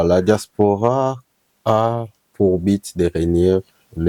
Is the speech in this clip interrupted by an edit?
no; 0 cuts

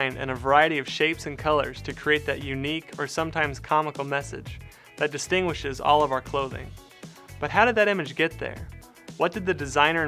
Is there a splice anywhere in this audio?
no; 0 cuts

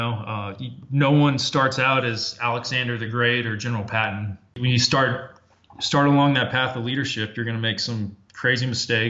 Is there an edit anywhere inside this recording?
yes; 1 cut; at 4.5 s

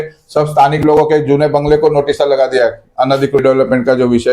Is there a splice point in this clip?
yes; 1 cut; at 3.4 s

